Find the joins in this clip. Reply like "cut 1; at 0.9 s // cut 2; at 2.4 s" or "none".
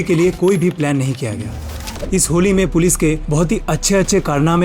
cut 1; at 1.8 s // cut 2; at 3.2 s